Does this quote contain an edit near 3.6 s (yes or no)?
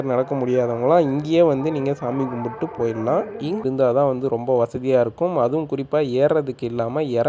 yes